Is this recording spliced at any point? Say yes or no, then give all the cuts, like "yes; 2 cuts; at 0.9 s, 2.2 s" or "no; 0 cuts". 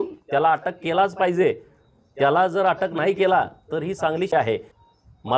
yes; 1 cut; at 4.3 s